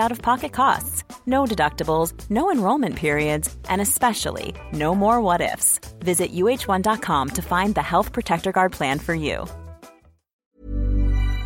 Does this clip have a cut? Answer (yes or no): yes